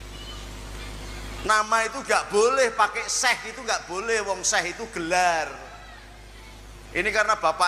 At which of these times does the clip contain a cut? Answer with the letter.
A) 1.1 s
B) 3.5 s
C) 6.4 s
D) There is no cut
D